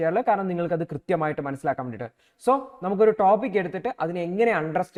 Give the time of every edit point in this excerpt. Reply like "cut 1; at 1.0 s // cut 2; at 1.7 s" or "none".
none